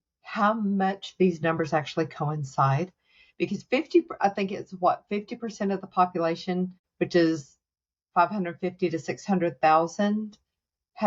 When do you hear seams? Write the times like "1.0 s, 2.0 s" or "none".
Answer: 6.8 s